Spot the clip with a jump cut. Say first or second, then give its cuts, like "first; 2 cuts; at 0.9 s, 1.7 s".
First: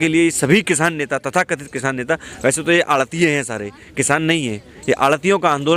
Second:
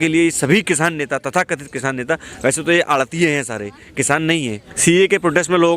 second; 1 cut; at 4.7 s